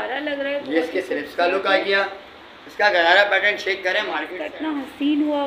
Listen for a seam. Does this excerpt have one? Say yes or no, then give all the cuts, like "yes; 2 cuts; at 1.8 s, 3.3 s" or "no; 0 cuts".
yes; 1 cut; at 4.4 s